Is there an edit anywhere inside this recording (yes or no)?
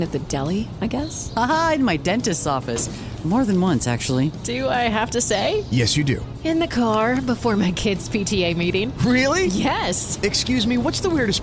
no